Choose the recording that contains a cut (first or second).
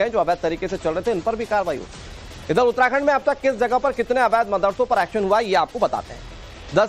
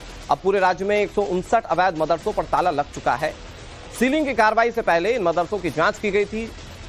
first